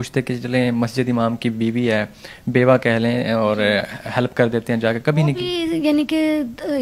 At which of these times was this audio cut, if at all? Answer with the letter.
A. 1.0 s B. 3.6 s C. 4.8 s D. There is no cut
D